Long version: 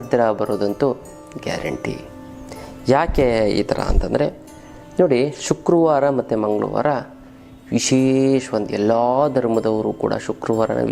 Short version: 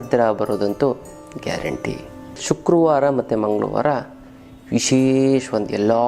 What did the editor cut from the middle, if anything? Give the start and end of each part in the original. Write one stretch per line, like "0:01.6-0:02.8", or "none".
0:02.4-0:05.4